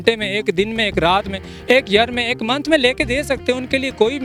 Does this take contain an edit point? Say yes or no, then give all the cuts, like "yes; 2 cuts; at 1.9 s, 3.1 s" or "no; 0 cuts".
no; 0 cuts